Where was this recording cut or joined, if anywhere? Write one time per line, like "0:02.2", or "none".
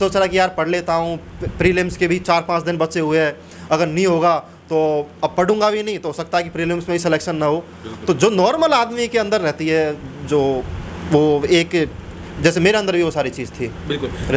none